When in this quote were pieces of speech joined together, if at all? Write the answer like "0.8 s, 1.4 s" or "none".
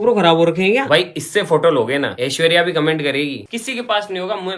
0.8 s, 2.2 s, 3.5 s